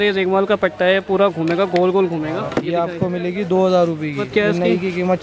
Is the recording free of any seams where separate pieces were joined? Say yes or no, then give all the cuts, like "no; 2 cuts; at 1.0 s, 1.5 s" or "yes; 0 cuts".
no; 2 cuts; at 2.5 s, 4.2 s